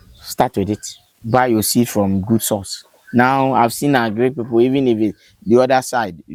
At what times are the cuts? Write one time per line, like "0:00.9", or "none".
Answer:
none